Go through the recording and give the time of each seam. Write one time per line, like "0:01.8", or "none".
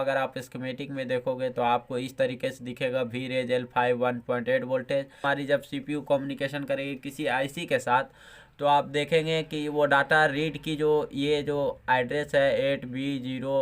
0:05.1